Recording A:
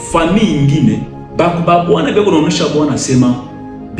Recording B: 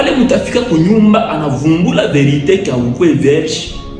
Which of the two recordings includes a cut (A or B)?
A